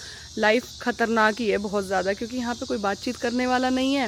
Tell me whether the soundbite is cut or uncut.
uncut